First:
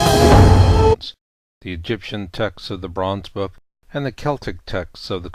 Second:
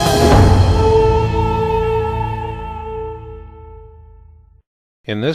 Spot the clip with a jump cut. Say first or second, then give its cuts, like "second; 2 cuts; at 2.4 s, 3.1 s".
second; 1 cut; at 0.9 s